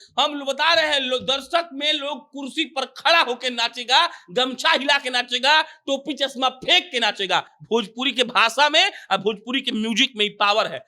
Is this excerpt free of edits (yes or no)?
yes